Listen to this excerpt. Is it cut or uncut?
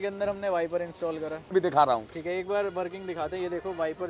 cut